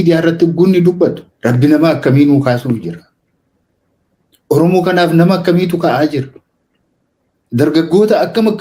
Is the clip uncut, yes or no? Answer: no